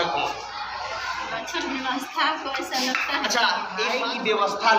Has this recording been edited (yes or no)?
yes